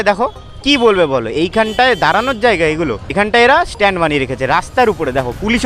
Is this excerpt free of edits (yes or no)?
no